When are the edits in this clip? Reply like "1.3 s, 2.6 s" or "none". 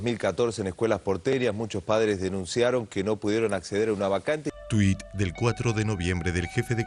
none